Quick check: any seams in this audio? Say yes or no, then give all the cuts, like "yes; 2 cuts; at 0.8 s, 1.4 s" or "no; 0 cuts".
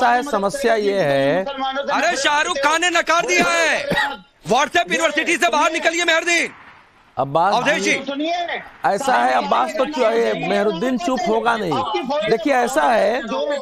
yes; 1 cut; at 5.2 s